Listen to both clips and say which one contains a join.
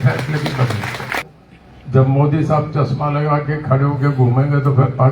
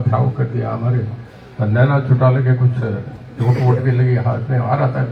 first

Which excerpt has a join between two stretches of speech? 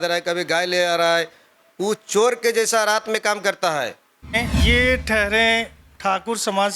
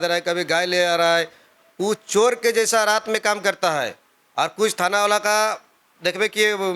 first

